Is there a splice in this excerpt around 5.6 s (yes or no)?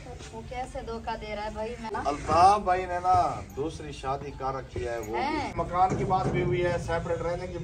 yes